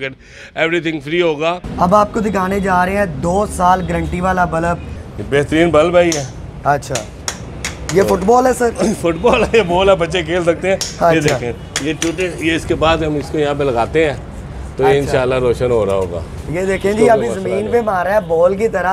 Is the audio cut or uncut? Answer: cut